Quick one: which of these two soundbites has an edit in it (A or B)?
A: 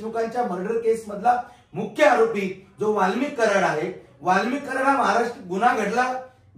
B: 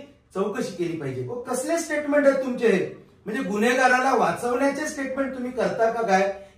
B